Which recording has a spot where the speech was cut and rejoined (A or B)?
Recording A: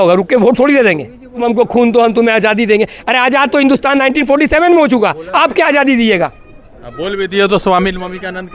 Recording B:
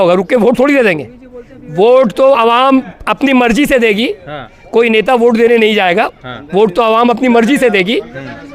A